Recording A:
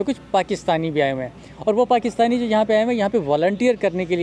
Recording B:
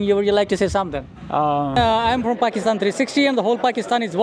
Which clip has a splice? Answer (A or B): B